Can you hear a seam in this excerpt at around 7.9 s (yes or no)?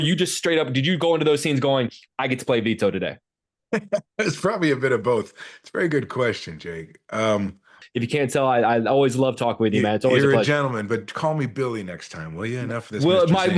yes